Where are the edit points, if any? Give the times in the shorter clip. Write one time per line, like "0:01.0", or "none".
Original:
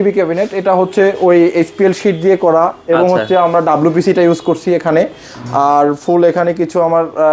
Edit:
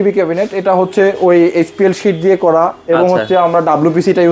none